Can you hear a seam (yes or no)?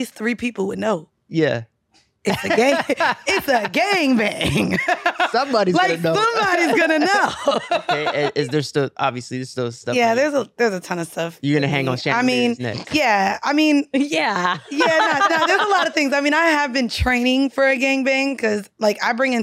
yes